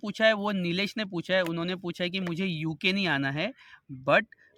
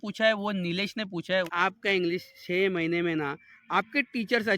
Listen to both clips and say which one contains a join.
second; 1 cut; at 1.5 s

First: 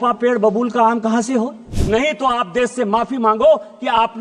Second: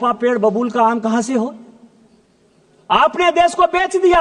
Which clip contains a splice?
first; 1 cut; at 1.8 s

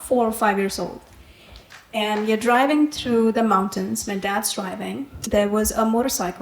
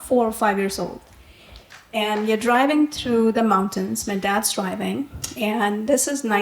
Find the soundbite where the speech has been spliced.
first; 1 cut; at 5.1 s

